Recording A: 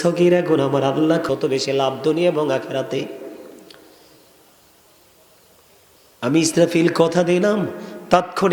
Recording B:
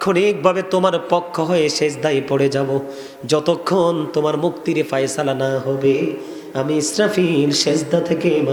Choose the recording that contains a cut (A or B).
A